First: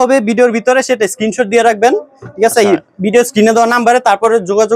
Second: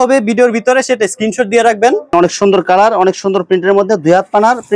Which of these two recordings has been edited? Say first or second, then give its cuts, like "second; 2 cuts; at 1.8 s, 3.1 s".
second; 1 cut; at 2.1 s